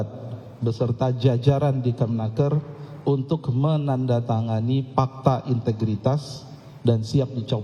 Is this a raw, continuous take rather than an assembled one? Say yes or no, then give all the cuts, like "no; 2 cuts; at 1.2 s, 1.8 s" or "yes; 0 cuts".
yes; 0 cuts